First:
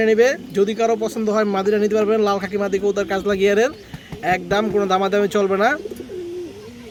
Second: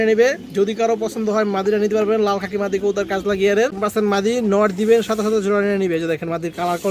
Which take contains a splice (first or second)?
second